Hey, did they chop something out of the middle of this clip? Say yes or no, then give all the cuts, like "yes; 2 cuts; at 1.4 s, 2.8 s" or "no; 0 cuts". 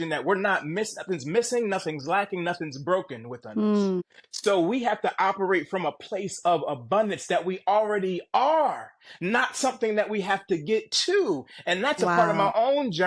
no; 0 cuts